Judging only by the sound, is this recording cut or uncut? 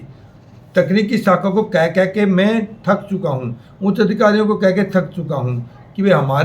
uncut